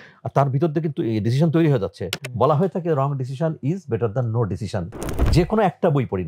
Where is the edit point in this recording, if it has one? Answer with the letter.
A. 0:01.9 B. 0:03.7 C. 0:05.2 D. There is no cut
C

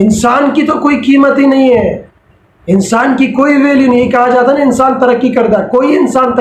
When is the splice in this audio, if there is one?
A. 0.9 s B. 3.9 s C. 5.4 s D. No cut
D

